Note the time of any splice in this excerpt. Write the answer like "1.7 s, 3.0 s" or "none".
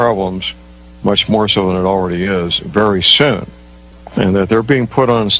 0.9 s